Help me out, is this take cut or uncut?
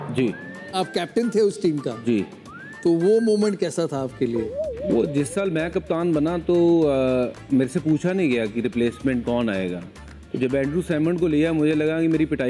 uncut